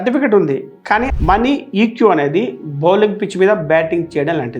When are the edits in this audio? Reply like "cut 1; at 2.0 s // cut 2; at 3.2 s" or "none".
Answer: cut 1; at 1.1 s